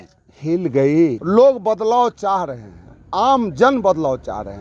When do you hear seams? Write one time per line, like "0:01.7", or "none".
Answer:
0:01.2